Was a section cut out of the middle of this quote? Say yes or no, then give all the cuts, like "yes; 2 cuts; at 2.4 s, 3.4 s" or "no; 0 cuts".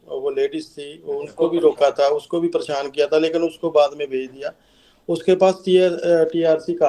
no; 0 cuts